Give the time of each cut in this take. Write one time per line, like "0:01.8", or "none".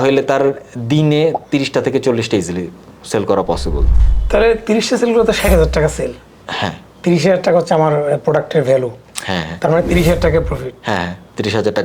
0:03.9